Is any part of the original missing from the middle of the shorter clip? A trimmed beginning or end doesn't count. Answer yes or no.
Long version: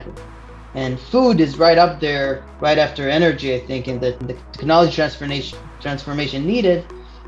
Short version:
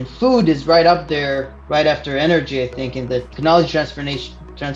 yes